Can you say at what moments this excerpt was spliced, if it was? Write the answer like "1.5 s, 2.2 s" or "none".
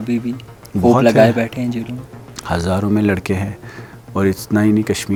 none

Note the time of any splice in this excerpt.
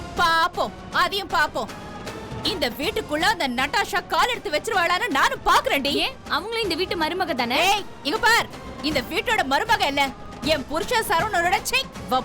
none

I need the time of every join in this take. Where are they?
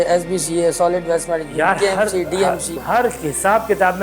2.8 s

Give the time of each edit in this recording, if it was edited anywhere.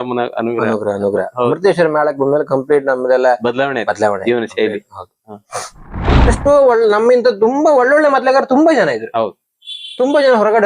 6.2 s

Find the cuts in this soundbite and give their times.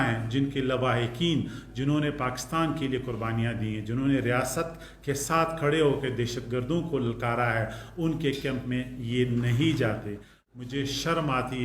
10.4 s

